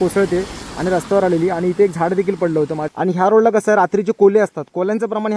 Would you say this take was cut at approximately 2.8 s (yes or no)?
yes